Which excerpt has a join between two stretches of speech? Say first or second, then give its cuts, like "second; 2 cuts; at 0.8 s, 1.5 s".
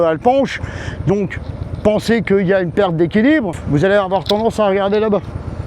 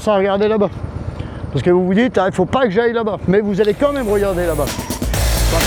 first; 1 cut; at 3.6 s